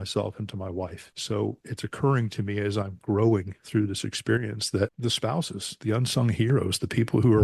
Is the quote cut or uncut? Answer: cut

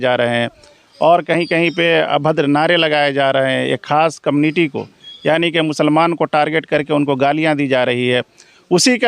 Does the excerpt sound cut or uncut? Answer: uncut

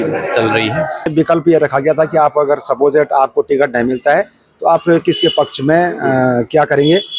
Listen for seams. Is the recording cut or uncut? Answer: cut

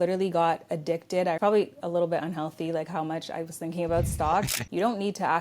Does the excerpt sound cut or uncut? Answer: cut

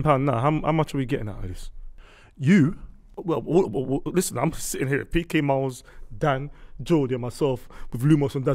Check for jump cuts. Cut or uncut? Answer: uncut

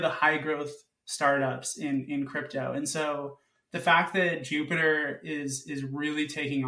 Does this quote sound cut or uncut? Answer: uncut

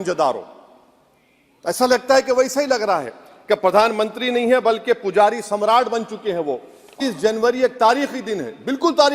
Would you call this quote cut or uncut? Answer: cut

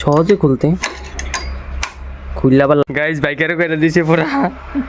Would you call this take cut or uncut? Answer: cut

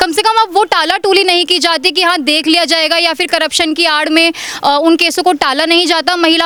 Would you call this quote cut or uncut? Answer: uncut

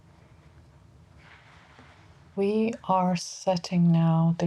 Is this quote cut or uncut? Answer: cut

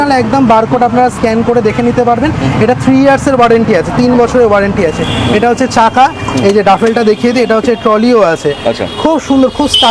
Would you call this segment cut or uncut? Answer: uncut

